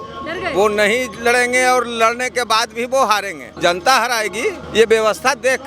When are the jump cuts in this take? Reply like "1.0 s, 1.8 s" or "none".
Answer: 3.4 s, 4.6 s

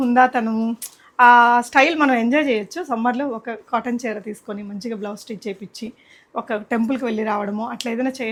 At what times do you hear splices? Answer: none

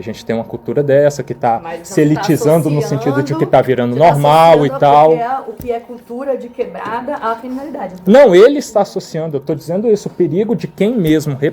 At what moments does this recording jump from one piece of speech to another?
none

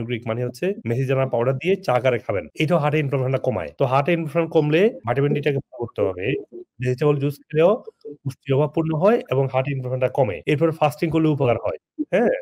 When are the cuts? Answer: none

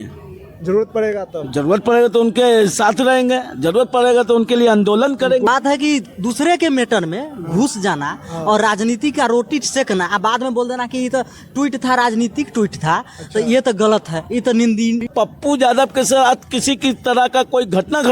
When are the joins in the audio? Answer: 5.5 s, 15.0 s

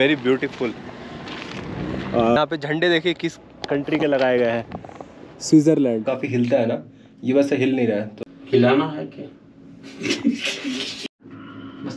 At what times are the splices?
2.4 s, 6.1 s, 8.1 s, 10.9 s

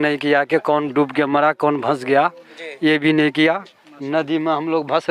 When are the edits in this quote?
none

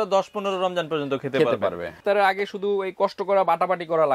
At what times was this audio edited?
2.0 s

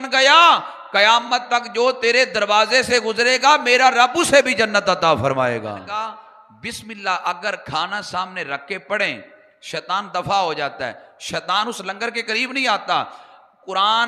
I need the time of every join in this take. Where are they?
5.8 s

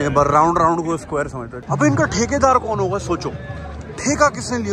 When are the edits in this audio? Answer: 1.5 s

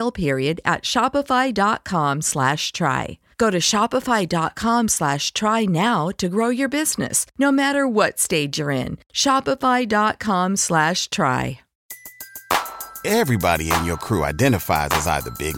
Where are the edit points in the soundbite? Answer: 11.7 s

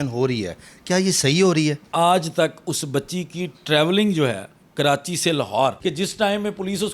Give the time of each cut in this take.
1.8 s, 5.8 s

